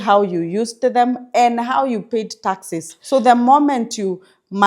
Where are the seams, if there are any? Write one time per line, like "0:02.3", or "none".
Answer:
0:02.9